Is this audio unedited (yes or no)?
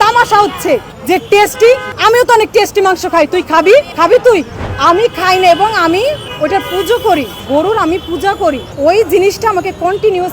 no